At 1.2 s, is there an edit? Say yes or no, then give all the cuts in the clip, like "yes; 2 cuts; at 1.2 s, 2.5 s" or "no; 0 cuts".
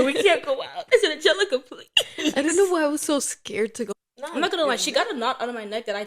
no; 1 cut; at 3.9 s